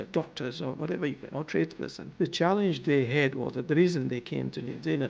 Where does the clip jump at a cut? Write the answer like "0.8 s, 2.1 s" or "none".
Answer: 2.0 s